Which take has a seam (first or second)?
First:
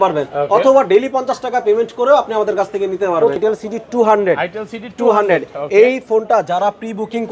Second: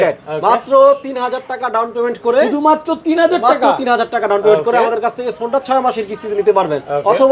first